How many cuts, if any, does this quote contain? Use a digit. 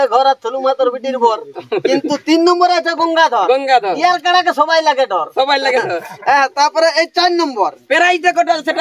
0